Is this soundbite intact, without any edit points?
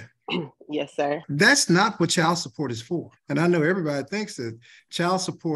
no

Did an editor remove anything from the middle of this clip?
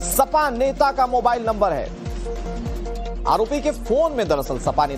yes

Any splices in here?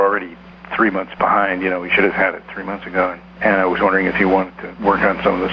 yes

